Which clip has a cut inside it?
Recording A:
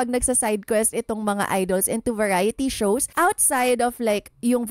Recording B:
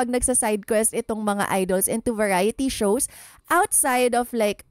A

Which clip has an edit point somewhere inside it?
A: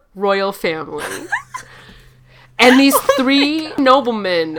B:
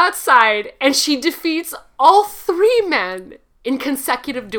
A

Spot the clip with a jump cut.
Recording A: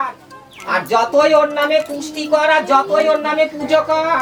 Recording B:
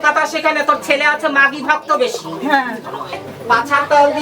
B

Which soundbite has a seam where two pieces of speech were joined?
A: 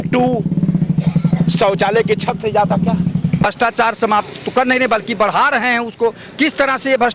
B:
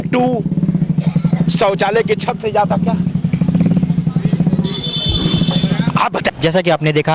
A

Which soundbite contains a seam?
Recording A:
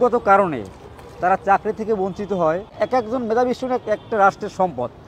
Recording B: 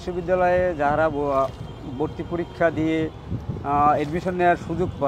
A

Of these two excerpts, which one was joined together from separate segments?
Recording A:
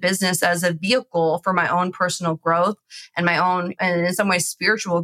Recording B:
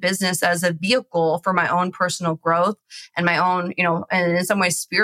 A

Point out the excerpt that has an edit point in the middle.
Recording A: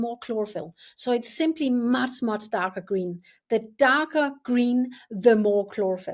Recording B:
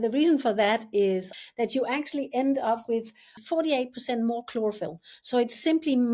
B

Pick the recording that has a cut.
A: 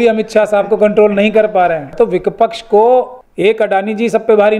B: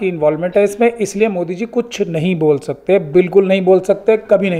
A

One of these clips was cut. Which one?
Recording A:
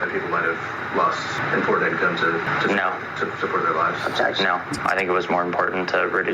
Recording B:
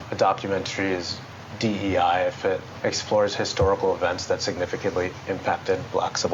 A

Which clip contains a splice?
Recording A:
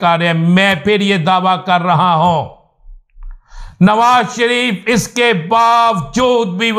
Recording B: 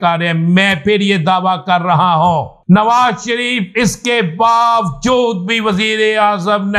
B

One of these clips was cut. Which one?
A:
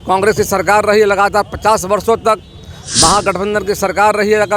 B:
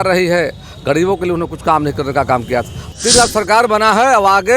B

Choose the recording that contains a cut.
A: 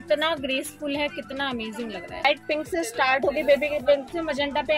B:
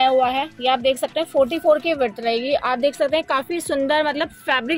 A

